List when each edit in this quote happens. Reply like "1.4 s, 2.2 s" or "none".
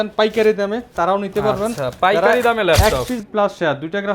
3.2 s